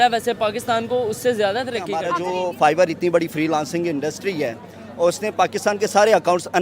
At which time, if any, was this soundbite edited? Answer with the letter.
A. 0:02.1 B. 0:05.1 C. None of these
A